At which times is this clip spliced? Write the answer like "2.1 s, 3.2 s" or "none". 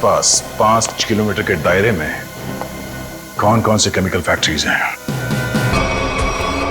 5.7 s